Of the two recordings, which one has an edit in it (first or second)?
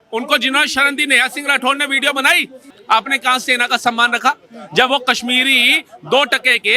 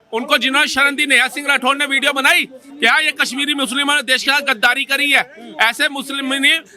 first